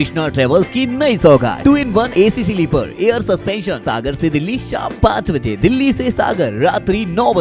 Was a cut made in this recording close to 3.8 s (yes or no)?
yes